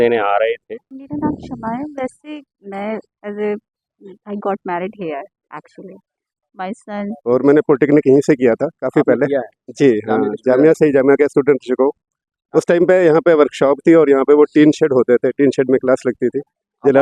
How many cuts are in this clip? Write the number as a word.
two